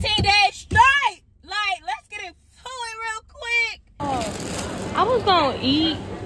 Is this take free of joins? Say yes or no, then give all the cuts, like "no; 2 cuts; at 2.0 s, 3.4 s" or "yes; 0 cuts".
no; 1 cut; at 4.0 s